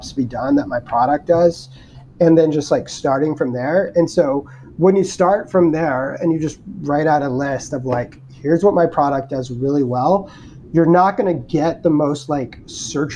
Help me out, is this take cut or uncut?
uncut